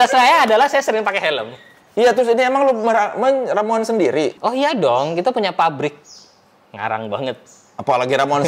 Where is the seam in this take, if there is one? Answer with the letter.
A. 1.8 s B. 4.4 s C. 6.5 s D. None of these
B